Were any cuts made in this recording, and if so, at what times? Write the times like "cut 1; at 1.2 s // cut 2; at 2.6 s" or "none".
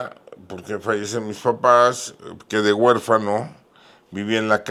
none